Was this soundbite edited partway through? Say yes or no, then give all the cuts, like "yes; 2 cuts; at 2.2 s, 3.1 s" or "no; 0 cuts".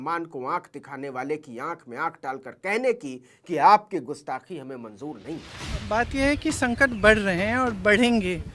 no; 0 cuts